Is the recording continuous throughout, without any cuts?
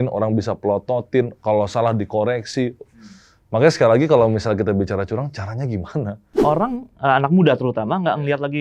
no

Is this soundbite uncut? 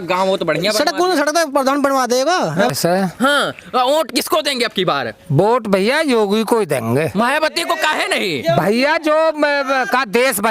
no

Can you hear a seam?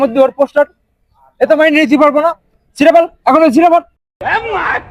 no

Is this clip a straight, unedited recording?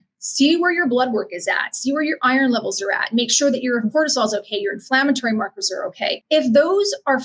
no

